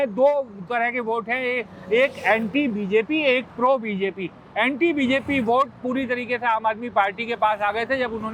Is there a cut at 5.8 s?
no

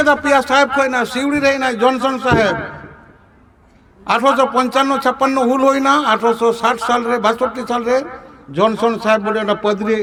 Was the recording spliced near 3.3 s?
no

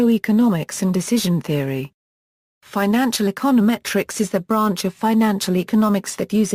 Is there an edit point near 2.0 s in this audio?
yes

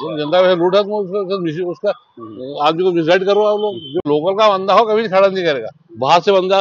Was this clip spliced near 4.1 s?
yes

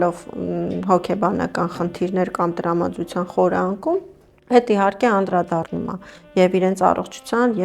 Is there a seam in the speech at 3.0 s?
no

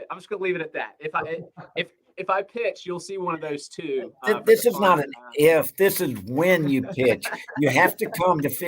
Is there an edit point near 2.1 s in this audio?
yes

